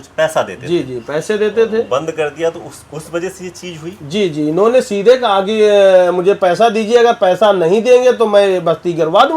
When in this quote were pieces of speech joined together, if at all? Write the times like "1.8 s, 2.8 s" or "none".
none